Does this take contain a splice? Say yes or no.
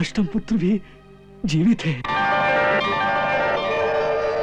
no